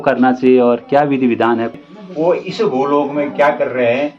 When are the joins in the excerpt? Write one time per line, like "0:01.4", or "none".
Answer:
0:01.8